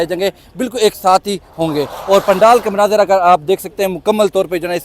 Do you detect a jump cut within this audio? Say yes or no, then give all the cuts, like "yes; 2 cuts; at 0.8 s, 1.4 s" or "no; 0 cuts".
no; 0 cuts